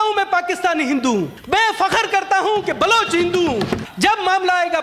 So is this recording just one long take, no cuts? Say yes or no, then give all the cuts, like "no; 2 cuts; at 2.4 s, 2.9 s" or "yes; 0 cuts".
no; 2 cuts; at 1.4 s, 3.8 s